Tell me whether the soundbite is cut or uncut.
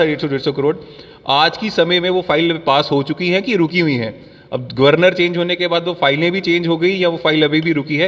uncut